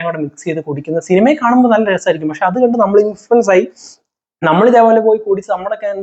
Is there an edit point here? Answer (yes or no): no